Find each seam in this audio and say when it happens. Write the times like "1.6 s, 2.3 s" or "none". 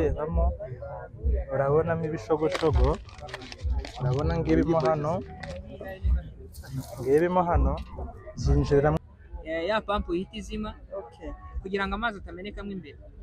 9.0 s